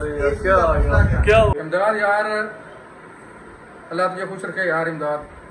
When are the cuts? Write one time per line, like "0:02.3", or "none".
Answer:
0:01.6